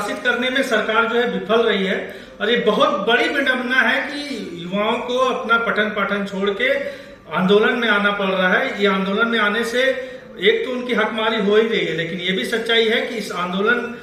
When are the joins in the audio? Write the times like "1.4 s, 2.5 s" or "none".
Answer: none